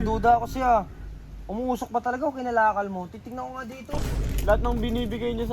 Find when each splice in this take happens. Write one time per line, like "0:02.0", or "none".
0:03.9

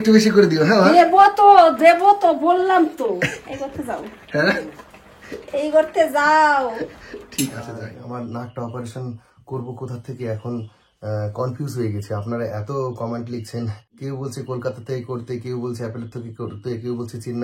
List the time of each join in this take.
0:07.9
0:13.9

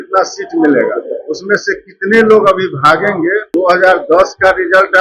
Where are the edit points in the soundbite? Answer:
0:03.5

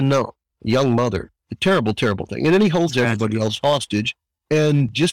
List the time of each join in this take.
none

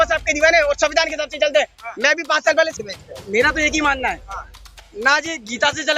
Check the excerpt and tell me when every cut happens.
0:02.7

